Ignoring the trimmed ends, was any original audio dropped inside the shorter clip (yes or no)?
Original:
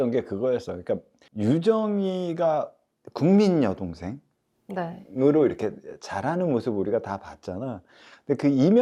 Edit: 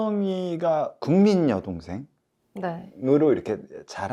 yes